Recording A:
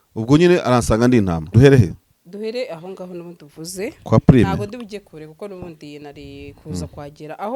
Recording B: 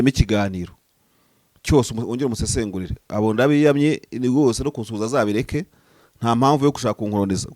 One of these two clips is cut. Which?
A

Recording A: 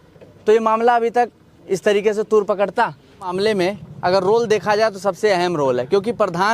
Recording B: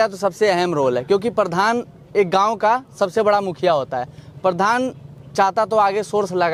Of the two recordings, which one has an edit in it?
A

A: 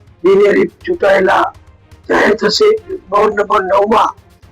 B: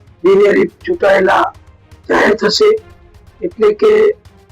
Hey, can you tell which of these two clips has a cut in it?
A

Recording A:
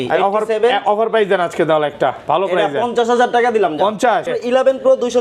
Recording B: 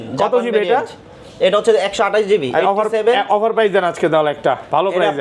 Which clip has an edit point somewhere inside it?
A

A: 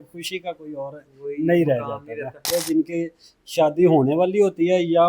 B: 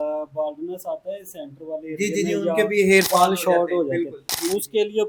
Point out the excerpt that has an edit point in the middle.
A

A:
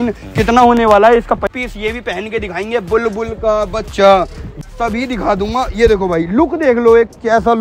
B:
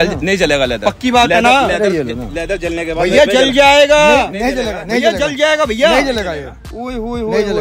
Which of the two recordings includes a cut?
A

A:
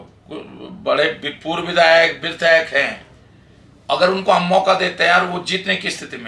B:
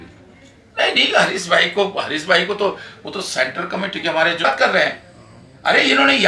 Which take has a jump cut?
B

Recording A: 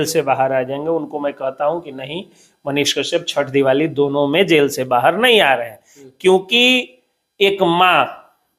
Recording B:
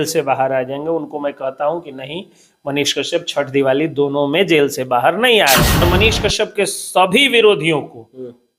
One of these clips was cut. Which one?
B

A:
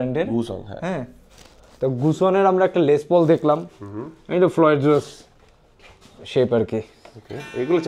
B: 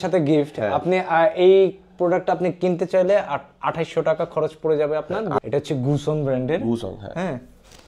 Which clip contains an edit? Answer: B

